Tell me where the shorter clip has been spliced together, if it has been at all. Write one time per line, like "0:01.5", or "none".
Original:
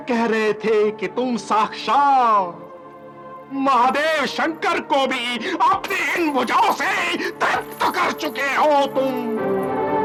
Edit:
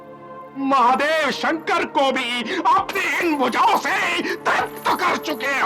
none